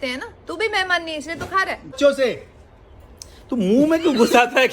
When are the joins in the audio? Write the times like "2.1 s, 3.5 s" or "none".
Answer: 1.9 s